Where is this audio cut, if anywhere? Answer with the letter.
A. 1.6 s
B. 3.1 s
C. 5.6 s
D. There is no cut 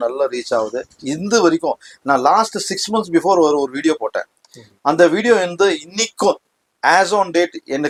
D